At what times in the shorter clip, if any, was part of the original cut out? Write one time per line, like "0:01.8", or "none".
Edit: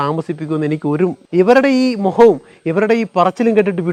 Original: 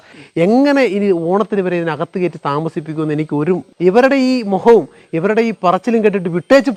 none